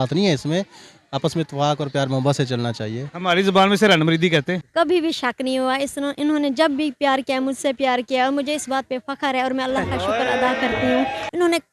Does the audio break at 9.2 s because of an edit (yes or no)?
yes